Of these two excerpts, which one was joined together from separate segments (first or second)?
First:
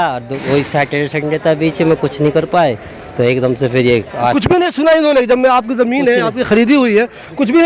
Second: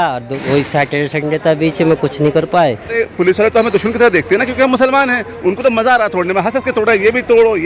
second